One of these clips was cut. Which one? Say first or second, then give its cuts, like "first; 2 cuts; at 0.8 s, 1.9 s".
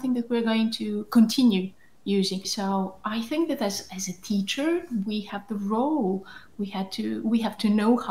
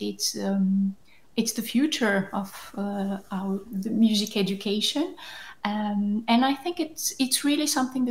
first; 1 cut; at 2.5 s